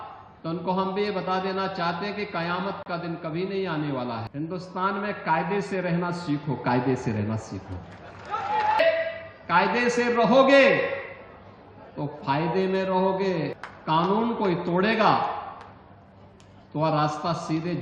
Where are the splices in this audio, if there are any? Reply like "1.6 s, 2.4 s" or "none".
4.3 s, 8.8 s, 13.6 s